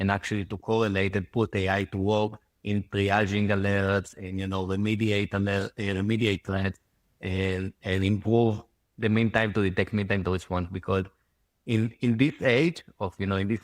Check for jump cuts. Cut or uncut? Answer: uncut